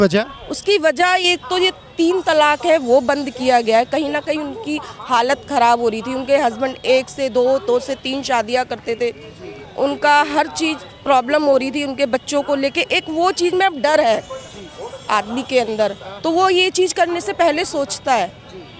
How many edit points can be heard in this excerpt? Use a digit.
0